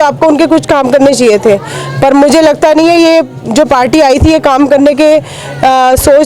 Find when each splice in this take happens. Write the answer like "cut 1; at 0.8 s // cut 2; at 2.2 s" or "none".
none

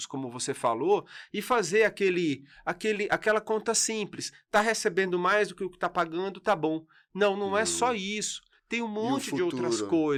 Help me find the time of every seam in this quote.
none

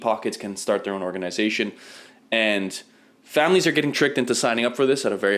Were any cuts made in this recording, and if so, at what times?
none

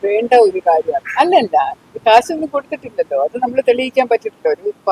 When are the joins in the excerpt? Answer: cut 1; at 1.0 s

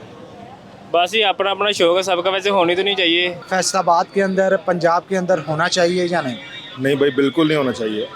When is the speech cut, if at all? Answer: cut 1; at 3.4 s

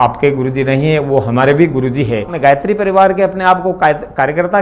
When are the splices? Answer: cut 1; at 2.3 s

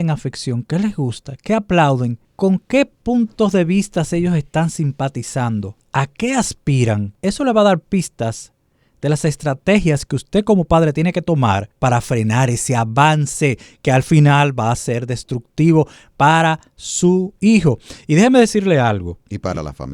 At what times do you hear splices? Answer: cut 1; at 2.2 s // cut 2; at 5.8 s // cut 3; at 7.1 s // cut 4; at 11.7 s

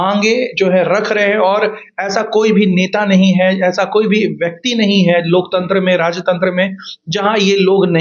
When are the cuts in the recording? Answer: none

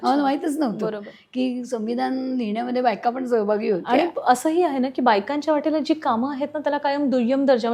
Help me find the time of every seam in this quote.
none

